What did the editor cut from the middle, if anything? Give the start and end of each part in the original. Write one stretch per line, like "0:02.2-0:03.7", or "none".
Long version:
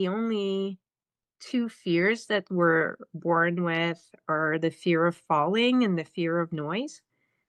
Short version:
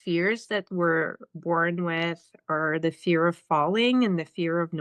none